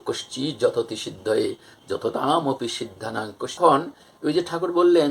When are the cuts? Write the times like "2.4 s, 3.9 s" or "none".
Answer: 3.6 s